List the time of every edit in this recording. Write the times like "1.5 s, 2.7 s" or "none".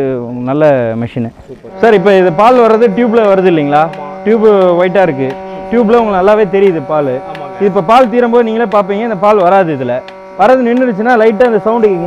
1.6 s